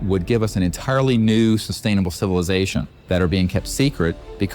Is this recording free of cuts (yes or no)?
no